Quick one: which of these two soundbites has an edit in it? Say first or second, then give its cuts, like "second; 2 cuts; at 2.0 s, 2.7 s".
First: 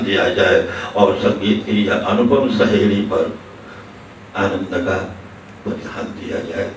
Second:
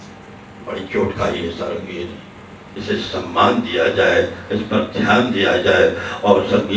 second; 1 cut; at 2.7 s